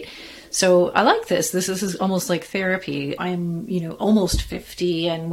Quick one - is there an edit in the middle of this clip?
yes; 2 cuts; at 1.6 s, 3.2 s

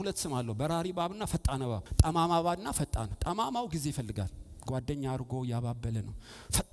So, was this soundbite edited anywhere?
yes; 1 cut; at 1.8 s

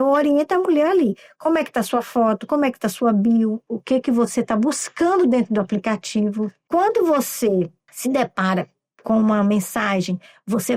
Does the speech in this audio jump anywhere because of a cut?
no; 0 cuts

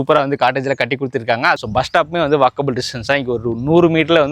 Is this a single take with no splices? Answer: no; 1 cut; at 1.6 s

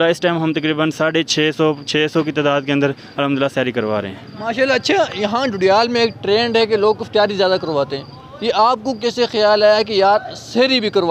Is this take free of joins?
yes; 0 cuts

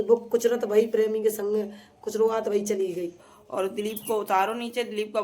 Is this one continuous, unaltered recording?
no; 1 cut; at 3.2 s

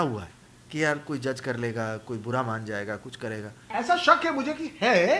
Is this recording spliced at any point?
yes; 1 cut; at 3.6 s

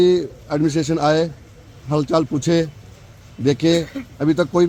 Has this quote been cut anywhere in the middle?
no; 0 cuts

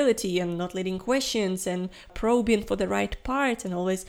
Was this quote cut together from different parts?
yes; 1 cut; at 2.1 s

